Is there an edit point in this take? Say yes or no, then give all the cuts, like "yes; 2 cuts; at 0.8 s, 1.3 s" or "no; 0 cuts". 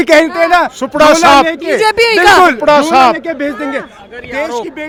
no; 0 cuts